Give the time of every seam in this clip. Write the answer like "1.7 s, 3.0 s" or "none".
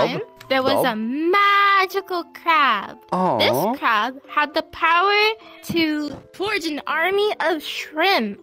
none